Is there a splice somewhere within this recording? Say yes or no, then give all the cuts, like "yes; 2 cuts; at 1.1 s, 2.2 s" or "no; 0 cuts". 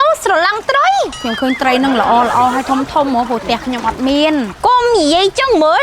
yes; 2 cuts; at 1.2 s, 4.5 s